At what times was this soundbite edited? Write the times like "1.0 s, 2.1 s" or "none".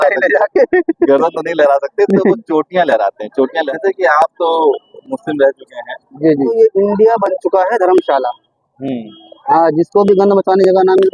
3.6 s, 6.5 s